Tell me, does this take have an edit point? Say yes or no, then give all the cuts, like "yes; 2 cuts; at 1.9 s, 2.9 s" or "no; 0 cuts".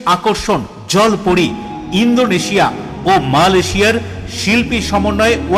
no; 0 cuts